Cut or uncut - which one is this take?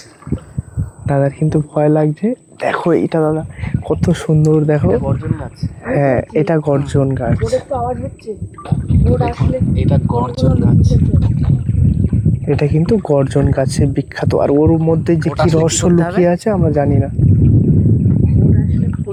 uncut